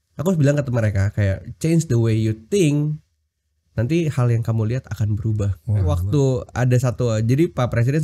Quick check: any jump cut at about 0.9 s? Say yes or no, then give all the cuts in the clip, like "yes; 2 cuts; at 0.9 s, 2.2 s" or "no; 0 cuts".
no; 1 cut; at 6.0 s